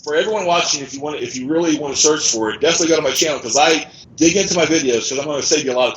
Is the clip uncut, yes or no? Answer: no